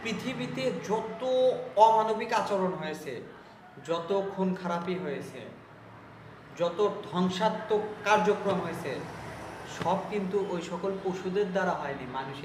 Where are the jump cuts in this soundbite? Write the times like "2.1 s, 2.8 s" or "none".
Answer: none

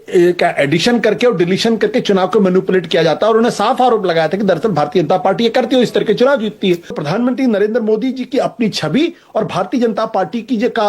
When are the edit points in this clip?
7.0 s

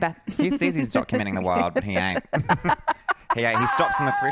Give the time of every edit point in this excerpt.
none

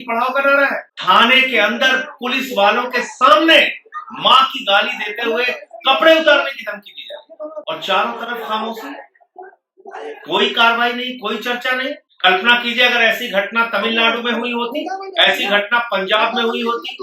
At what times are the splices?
0.9 s, 7.6 s, 12.1 s

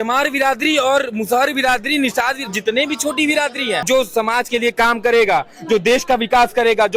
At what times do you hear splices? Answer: 3.8 s

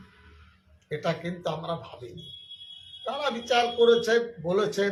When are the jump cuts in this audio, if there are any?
none

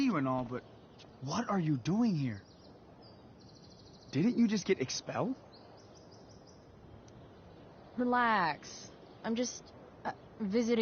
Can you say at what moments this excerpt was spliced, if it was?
none

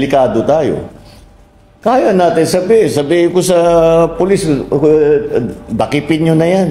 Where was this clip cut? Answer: none

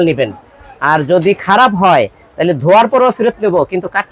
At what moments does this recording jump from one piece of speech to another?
none

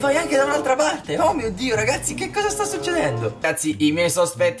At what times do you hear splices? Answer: 3.5 s

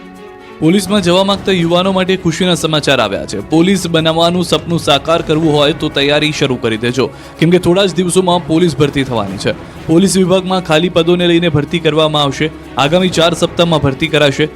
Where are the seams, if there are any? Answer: 13.2 s

